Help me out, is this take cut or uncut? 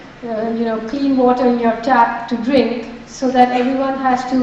cut